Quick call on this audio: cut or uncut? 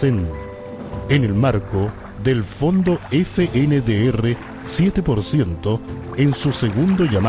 uncut